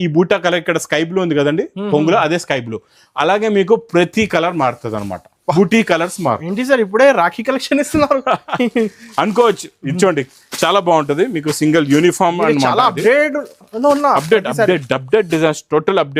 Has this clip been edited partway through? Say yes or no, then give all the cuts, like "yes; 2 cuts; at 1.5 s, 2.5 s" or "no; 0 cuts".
no; 0 cuts